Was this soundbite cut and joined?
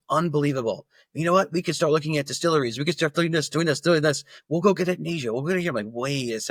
no; 0 cuts

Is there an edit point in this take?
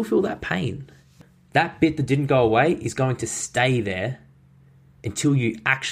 yes; 1 cut; at 1.1 s

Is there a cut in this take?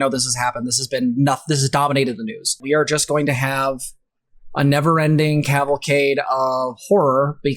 yes; 1 cut; at 2.6 s

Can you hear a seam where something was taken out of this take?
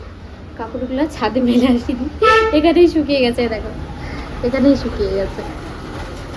no; 0 cuts

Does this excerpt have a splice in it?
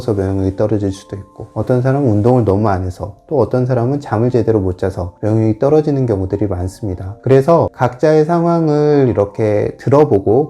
no; 0 cuts

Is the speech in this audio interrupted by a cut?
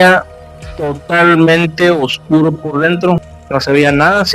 yes; 1 cut; at 3.3 s

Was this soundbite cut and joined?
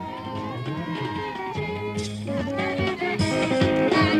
yes; 1 cut; at 1.9 s

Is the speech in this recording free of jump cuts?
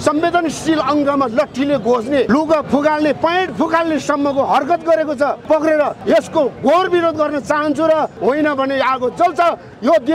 no; 4 cuts; at 2.3 s, 5.4 s, 6.0 s, 8.1 s

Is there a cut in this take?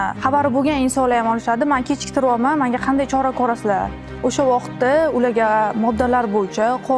no; 0 cuts

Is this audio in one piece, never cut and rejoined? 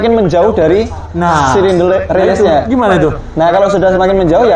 yes; 0 cuts

